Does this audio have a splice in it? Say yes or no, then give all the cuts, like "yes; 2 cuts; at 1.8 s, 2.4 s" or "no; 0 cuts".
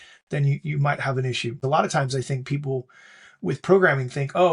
yes; 1 cut; at 1.6 s